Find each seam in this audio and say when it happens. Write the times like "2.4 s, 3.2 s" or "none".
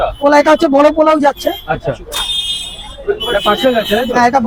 none